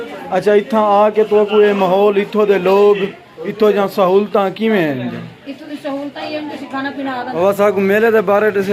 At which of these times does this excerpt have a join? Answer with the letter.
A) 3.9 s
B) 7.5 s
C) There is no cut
B